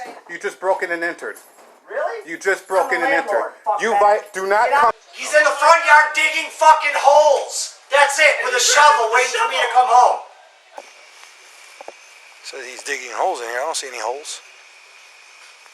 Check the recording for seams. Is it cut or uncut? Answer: cut